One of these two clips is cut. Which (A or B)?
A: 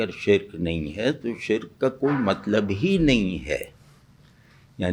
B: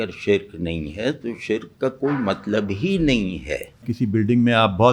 B